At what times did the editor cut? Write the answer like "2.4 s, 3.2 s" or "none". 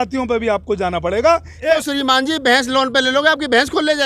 1.6 s